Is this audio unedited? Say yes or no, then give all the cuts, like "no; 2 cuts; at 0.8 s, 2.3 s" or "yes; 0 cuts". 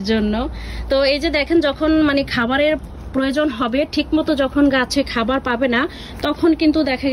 yes; 0 cuts